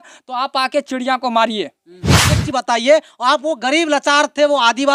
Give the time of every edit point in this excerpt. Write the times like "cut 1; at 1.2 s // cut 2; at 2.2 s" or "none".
cut 1; at 2.4 s